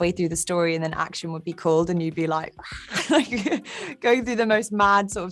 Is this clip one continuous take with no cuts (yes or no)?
yes